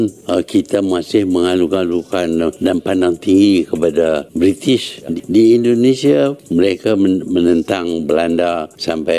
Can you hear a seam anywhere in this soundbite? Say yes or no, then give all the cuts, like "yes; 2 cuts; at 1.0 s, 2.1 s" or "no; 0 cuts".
yes; 1 cut; at 5.1 s